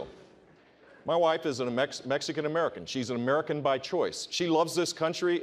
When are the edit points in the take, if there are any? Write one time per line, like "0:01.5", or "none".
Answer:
none